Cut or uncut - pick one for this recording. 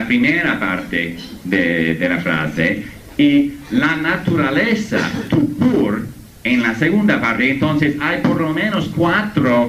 cut